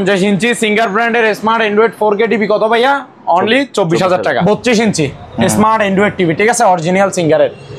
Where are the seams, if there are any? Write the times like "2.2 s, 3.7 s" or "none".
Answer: 4.4 s